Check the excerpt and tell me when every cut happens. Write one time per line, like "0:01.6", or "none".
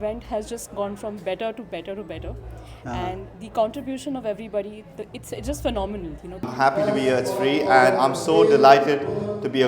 0:06.5